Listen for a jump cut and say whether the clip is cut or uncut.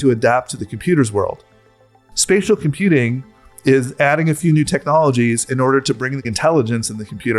cut